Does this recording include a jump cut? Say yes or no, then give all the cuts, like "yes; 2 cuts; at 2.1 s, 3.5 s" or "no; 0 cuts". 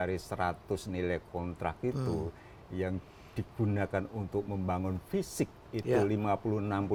no; 0 cuts